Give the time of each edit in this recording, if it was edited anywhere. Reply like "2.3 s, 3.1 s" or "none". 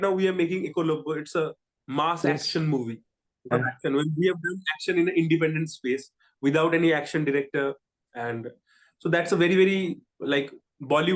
3.5 s